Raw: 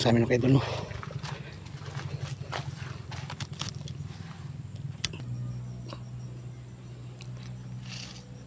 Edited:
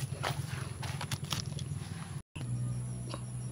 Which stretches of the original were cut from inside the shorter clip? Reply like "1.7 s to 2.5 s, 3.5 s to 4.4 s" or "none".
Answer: 4.6 s to 5.1 s